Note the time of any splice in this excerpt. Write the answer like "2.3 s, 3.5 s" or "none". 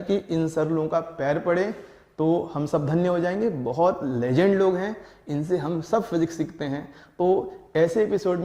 none